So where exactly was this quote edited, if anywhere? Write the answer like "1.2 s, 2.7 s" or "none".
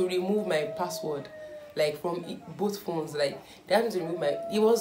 none